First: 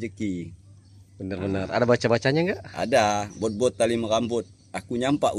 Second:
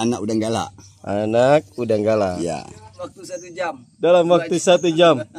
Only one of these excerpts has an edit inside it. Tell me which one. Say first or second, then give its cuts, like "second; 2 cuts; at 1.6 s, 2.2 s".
second; 1 cut; at 3.0 s